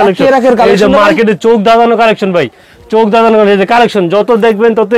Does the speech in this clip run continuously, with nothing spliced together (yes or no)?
yes